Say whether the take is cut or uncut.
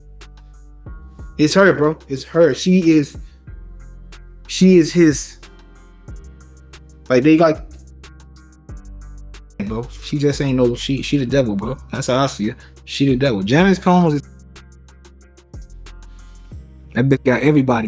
uncut